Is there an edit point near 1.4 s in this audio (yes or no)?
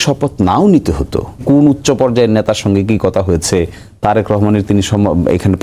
yes